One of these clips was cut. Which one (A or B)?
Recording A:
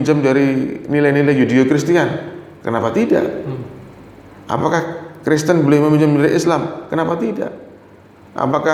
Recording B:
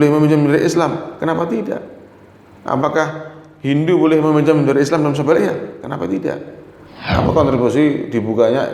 B